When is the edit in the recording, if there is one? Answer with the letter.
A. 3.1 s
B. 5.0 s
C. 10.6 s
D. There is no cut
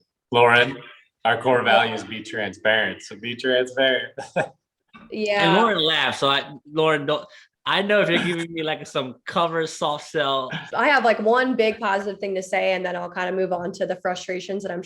C